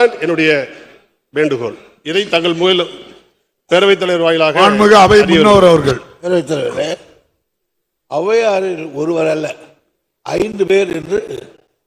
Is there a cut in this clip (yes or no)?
no